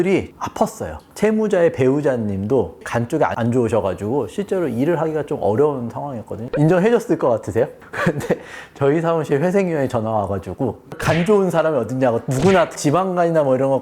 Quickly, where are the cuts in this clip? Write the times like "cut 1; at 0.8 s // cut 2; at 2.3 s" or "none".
cut 1; at 1.0 s // cut 2; at 2.8 s // cut 3; at 6.5 s // cut 4; at 7.9 s